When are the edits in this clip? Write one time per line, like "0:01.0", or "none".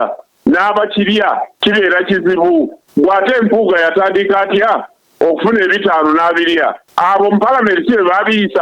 0:01.5
0:02.8
0:06.8